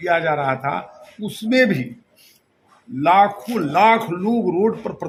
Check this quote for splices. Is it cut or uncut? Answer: uncut